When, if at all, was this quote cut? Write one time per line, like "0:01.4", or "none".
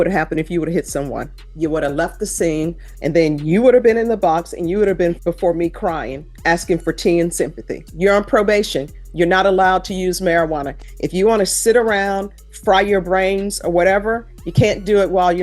0:01.4
0:02.9
0:05.2
0:07.8